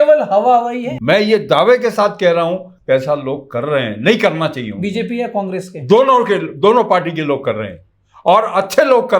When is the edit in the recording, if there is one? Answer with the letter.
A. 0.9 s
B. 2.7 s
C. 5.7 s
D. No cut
A